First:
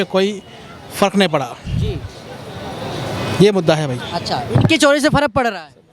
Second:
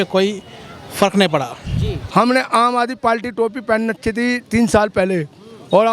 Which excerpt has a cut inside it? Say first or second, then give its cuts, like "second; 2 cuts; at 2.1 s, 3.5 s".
second; 1 cut; at 1.9 s